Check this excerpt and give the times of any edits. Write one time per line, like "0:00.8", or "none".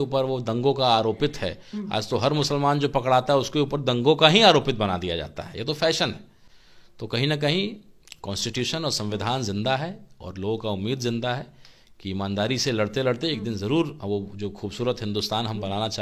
none